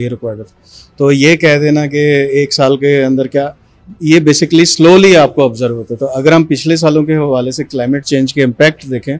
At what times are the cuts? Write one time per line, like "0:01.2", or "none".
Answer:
none